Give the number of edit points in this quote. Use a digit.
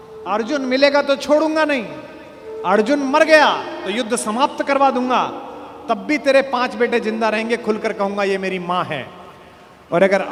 0